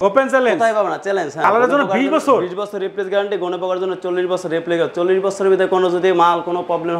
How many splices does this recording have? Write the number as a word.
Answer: one